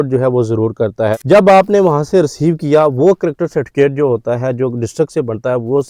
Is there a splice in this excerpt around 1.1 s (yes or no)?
yes